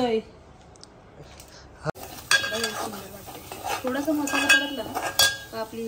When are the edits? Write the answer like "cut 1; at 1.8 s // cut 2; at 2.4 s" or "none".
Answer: cut 1; at 2.0 s

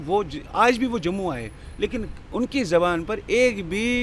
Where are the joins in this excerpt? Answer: none

